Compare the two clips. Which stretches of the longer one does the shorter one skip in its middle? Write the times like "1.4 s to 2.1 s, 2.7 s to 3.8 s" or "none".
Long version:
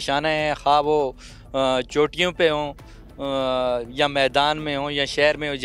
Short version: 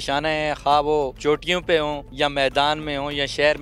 1.2 s to 1.9 s, 2.8 s to 3.9 s

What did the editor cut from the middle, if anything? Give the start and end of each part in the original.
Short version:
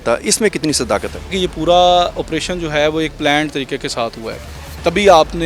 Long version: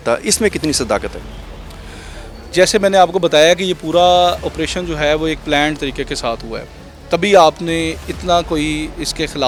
1.3 s to 3.6 s

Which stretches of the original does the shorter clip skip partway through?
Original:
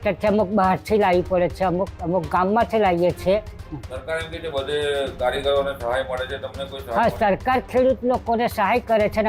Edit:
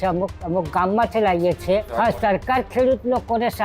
3.5 s to 6.9 s

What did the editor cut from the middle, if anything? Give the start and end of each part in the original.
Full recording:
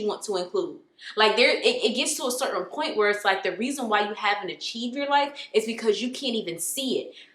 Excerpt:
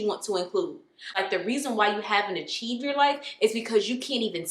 1.2 s to 3.3 s

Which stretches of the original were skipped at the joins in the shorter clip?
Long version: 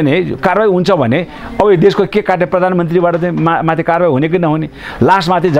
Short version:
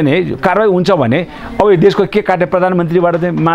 none

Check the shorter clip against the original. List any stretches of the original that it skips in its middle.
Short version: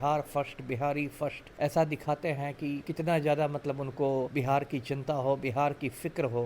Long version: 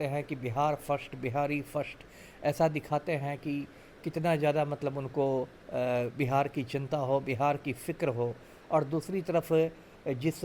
2.0 s to 2.3 s, 3.7 s to 4.0 s, 5.5 s to 6.1 s

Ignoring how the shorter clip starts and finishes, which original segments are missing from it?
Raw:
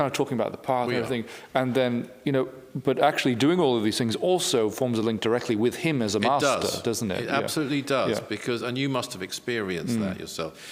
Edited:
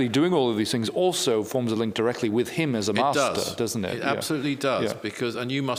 none

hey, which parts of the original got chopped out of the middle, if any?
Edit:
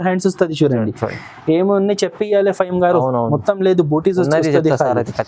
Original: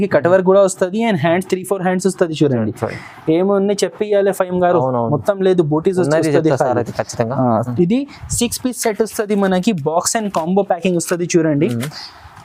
none

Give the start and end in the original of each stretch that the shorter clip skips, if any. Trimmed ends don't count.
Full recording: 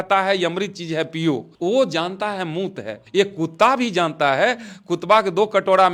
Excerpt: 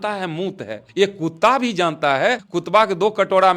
4.7 s to 4.9 s

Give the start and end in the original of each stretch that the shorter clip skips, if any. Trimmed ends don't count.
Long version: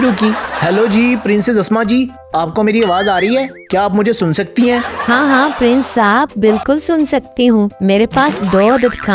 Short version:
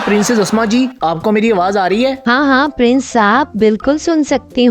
2.1 s to 2.3 s, 3.5 s to 5.0 s

